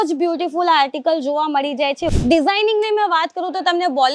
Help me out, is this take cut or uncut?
cut